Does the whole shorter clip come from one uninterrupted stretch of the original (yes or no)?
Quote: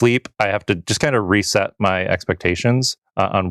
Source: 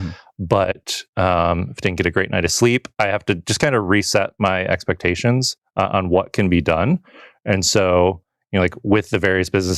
yes